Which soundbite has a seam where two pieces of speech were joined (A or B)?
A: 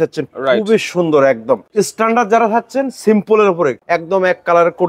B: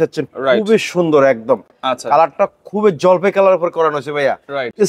A